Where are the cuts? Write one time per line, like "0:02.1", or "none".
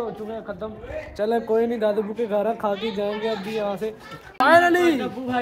none